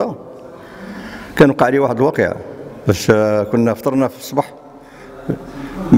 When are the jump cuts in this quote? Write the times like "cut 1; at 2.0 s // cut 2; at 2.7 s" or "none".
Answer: none